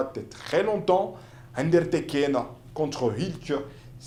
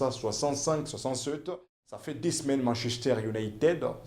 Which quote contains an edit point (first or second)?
second